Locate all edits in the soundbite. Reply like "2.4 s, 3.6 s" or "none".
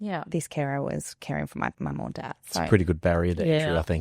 1.8 s